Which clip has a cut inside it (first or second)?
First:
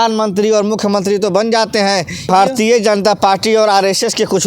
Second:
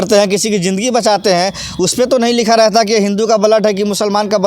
first